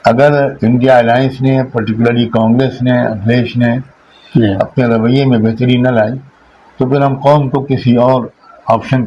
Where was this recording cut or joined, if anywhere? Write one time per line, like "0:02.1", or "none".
none